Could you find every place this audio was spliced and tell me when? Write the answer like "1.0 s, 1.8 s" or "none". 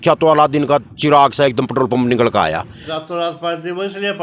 2.9 s